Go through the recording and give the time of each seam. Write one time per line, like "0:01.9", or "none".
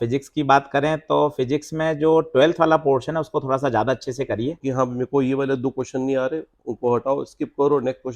0:04.6

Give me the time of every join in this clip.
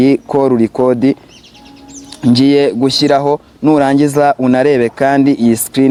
none

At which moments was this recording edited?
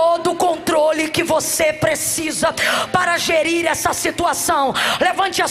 none

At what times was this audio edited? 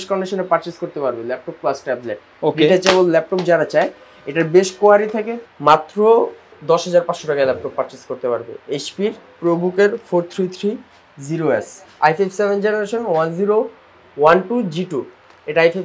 0:05.3
0:11.8

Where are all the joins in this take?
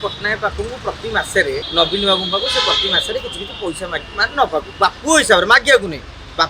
0:01.6

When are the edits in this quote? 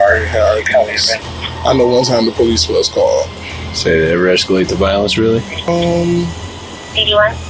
0:05.5

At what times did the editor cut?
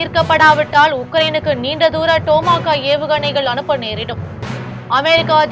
none

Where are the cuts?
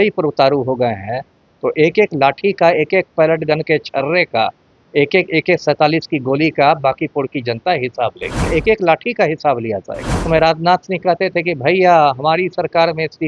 0:08.5
0:10.2

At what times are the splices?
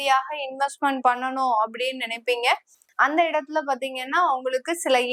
none

